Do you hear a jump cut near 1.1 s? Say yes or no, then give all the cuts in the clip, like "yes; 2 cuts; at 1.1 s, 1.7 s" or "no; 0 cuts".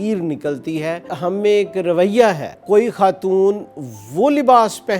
yes; 2 cuts; at 1.1 s, 2.6 s